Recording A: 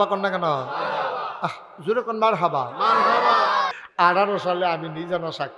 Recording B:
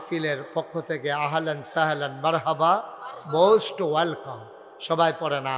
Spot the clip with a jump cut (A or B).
A